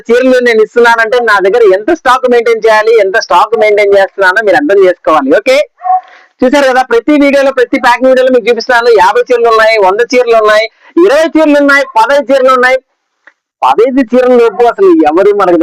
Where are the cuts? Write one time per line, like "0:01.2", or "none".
none